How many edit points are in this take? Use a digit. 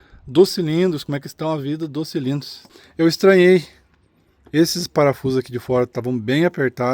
1